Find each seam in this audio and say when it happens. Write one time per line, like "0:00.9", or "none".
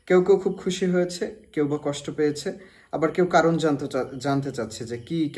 none